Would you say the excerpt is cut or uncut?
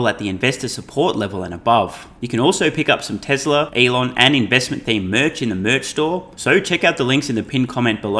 cut